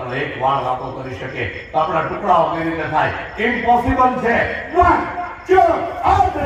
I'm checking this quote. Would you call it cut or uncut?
uncut